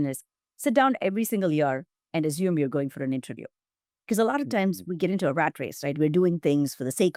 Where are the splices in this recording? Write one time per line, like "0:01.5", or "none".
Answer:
none